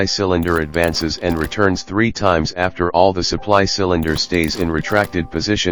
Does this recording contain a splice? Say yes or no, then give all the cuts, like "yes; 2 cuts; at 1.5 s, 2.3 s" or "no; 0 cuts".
no; 0 cuts